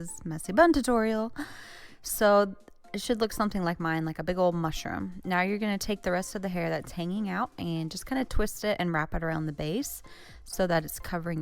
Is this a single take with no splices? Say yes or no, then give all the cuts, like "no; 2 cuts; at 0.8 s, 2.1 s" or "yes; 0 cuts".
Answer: no; 2 cuts; at 4.9 s, 8.9 s